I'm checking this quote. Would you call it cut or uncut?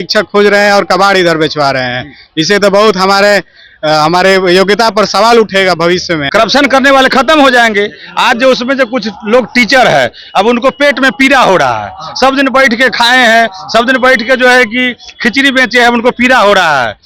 cut